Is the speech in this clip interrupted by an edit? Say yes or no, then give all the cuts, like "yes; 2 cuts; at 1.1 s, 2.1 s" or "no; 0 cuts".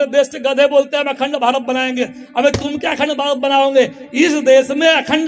no; 0 cuts